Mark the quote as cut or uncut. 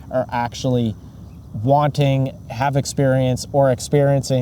uncut